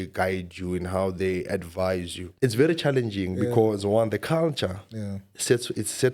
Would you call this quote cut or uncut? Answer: cut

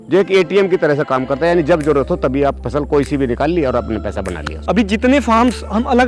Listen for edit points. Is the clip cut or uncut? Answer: uncut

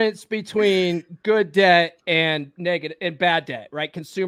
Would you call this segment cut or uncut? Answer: uncut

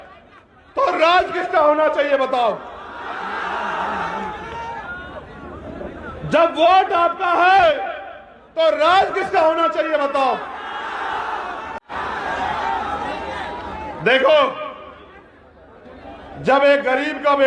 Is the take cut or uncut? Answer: cut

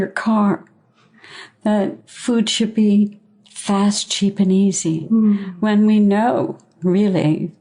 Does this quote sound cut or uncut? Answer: cut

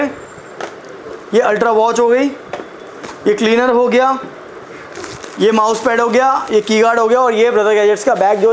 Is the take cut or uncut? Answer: uncut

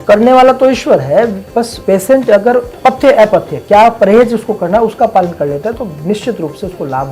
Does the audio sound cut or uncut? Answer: cut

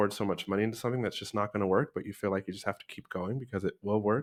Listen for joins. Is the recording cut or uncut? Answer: uncut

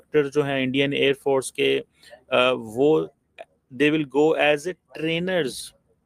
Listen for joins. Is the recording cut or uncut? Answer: uncut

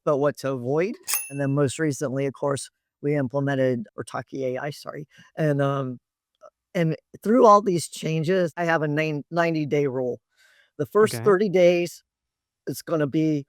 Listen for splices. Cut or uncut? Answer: cut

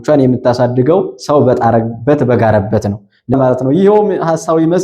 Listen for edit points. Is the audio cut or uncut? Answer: cut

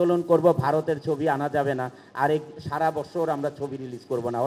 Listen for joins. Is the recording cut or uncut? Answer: uncut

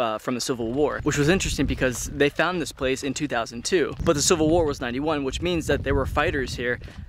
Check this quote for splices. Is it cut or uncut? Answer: cut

